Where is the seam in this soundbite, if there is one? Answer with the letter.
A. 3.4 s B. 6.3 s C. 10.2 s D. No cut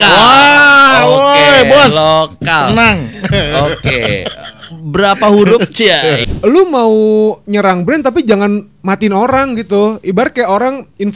B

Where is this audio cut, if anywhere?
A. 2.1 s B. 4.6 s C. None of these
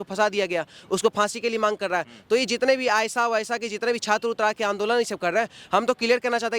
C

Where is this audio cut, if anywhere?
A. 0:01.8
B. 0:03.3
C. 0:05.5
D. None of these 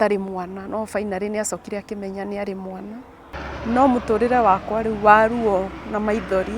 B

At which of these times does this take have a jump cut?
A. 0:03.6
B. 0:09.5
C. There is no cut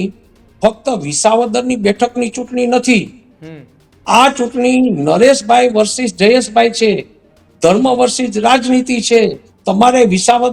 B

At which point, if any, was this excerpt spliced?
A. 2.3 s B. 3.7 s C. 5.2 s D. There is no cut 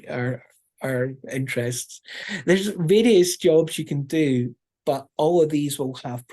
A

